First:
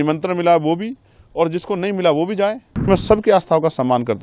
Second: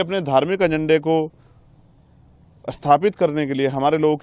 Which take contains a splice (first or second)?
first